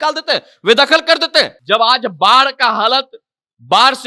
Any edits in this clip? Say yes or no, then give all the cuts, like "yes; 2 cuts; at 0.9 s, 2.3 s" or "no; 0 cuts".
yes; 1 cut; at 1.6 s